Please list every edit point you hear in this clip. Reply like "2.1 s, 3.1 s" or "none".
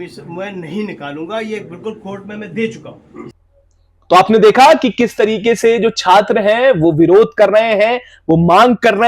3.4 s